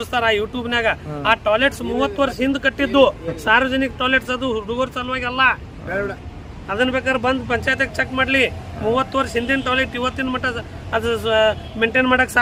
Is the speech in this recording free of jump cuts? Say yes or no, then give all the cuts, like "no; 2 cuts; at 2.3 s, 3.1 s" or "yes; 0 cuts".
yes; 0 cuts